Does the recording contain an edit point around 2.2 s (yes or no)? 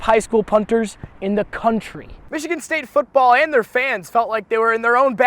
yes